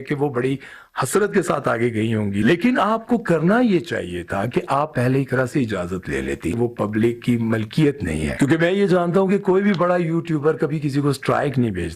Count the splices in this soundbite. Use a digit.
3